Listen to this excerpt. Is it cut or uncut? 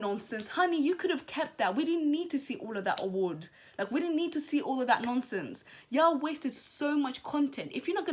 uncut